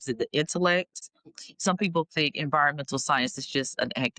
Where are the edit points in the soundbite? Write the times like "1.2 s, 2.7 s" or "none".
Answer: 1.1 s